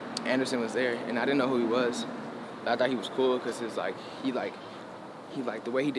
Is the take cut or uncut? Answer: uncut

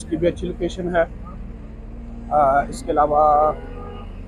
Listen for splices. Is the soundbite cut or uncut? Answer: uncut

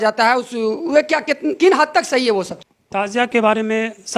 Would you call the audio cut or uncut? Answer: cut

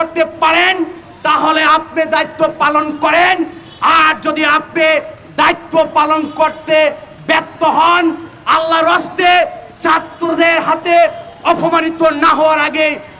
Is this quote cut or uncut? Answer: uncut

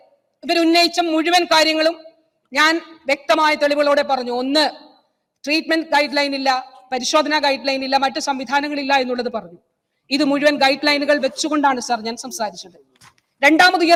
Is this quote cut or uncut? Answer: uncut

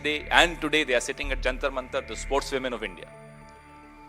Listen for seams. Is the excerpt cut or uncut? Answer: cut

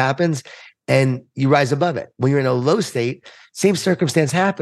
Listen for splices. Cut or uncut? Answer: uncut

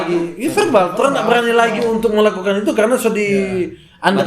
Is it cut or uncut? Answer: uncut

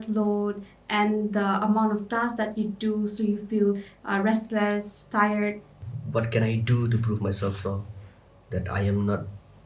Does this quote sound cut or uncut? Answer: cut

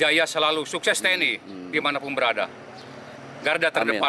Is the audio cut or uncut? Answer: uncut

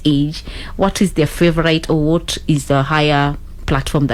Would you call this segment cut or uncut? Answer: uncut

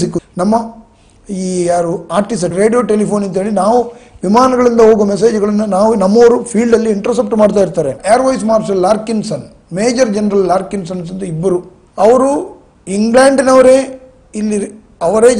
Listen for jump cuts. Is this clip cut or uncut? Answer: cut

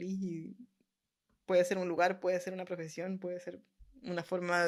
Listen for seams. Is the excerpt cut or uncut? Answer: uncut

